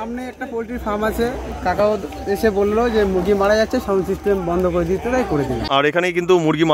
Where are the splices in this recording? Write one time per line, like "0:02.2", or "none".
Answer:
0:05.8